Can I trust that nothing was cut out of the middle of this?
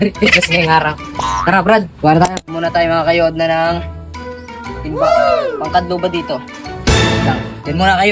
no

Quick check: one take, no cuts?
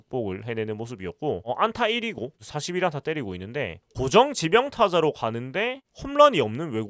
no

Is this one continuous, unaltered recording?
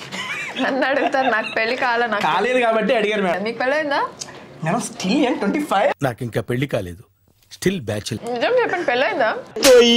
no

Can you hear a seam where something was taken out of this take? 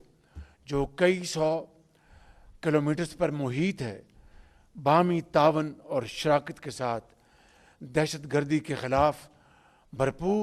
no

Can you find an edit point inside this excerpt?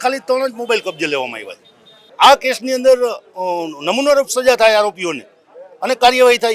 yes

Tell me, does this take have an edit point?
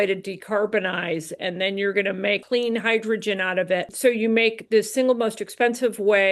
yes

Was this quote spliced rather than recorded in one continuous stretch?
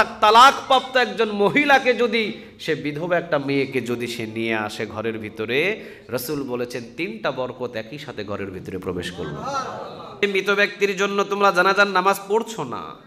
yes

